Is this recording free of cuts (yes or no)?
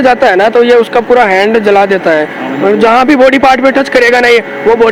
yes